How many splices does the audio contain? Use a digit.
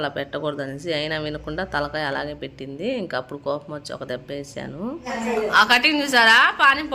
1